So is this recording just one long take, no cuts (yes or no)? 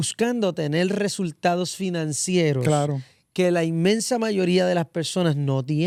yes